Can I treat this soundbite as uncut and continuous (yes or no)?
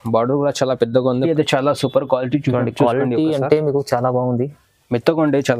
no